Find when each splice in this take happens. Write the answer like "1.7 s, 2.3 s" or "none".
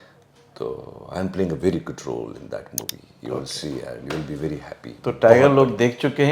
none